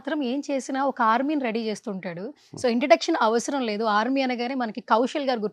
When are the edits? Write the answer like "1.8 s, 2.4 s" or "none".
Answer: none